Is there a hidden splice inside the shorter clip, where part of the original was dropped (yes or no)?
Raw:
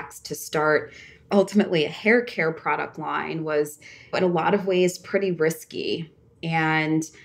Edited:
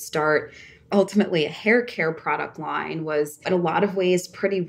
yes